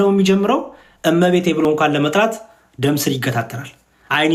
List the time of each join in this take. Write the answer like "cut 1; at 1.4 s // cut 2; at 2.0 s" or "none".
none